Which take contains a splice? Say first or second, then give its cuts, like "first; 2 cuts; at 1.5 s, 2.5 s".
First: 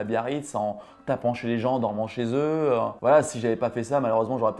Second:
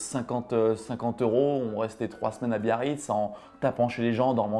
first; 1 cut; at 3.0 s